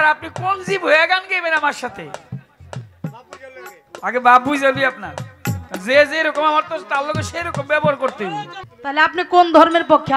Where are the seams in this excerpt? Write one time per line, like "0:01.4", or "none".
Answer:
0:08.6